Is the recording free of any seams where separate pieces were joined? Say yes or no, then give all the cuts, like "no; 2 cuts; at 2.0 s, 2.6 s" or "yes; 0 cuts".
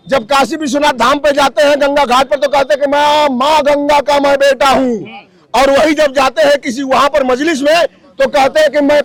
yes; 0 cuts